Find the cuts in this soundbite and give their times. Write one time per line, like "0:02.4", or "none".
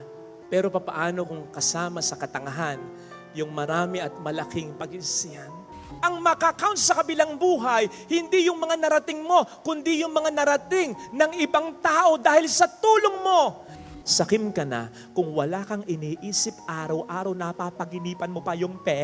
0:05.8
0:13.8